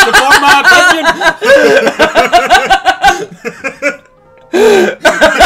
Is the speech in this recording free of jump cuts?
yes; 0 cuts

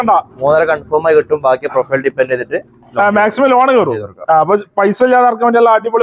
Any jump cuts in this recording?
no; 0 cuts

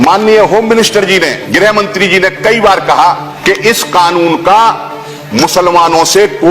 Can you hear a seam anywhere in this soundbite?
yes; 2 cuts; at 1.4 s, 3.3 s

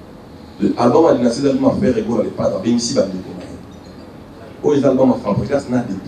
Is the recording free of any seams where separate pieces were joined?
yes; 0 cuts

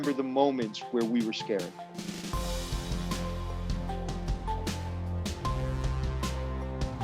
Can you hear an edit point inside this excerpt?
yes; 1 cut; at 1.9 s

